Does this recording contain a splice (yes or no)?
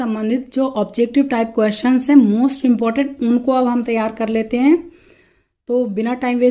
no